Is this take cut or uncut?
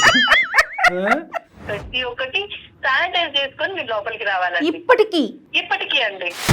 cut